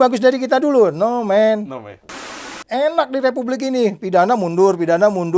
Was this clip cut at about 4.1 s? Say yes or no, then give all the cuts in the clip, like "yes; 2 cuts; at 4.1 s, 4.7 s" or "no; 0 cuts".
no; 1 cut; at 2.3 s